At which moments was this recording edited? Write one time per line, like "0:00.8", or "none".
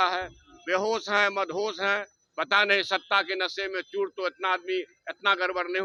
none

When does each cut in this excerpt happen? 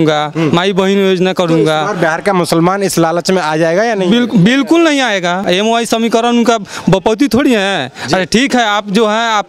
0:05.4

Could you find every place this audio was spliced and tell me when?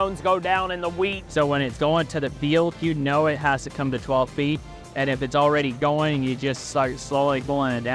0:01.2

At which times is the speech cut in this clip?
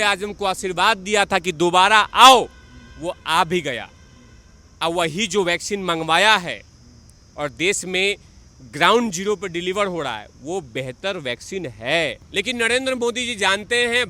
0:12.2

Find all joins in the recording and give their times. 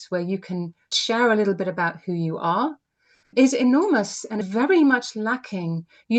0:00.9
0:03.3
0:04.4

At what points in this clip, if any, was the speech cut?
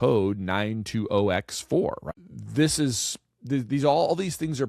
0:02.1

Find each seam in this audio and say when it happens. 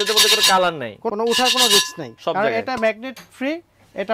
0:01.1
0:02.1

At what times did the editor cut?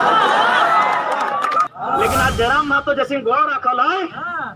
0:01.7

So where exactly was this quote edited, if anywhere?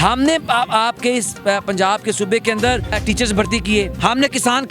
0:03.0
0:03.9

